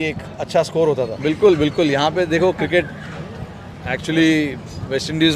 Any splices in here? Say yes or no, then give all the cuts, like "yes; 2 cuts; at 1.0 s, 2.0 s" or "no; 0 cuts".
yes; 1 cut; at 1.1 s